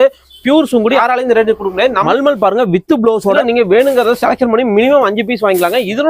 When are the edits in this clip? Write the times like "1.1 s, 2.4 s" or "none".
1.0 s, 2.1 s, 3.4 s